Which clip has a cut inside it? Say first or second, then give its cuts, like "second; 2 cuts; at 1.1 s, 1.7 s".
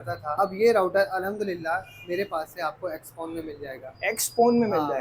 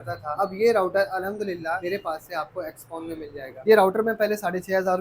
second; 2 cuts; at 1.8 s, 3.6 s